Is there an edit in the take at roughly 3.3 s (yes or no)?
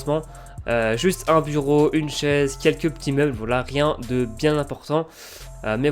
yes